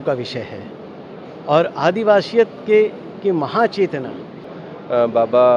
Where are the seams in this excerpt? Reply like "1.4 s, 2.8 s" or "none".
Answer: 4.6 s